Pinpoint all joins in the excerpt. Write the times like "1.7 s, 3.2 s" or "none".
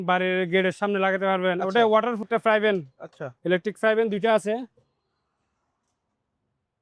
2.2 s